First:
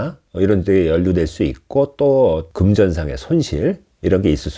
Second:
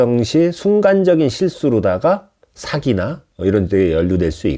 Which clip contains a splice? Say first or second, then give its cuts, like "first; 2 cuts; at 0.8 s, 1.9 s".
first; 1 cut; at 2.5 s